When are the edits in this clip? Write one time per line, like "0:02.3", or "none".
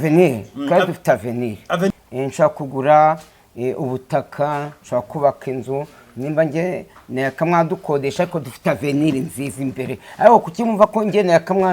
0:01.9